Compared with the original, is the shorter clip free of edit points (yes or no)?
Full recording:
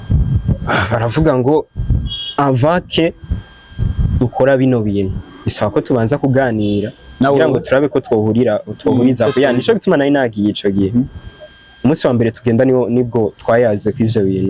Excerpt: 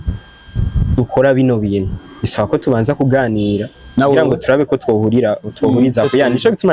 yes